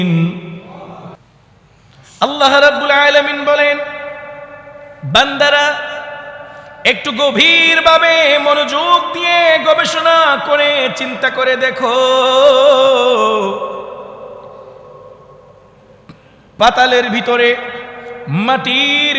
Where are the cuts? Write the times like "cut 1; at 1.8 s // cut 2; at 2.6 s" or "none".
cut 1; at 1.2 s